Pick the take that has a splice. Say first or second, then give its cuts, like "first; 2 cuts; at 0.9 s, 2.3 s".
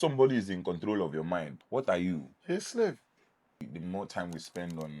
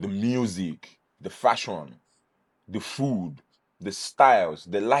first; 3 cuts; at 1.6 s, 2.3 s, 3.6 s